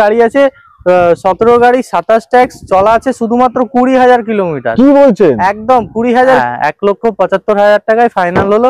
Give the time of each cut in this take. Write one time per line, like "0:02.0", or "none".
0:06.4